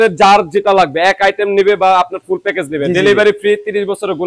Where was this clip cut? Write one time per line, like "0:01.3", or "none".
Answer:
none